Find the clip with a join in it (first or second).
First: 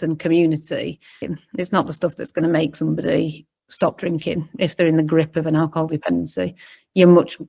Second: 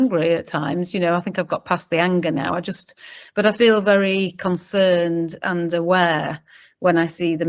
first